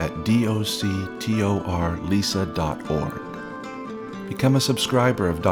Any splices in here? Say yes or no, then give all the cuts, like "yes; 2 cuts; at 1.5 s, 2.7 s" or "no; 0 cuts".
no; 0 cuts